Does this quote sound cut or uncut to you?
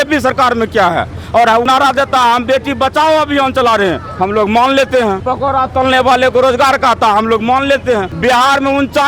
cut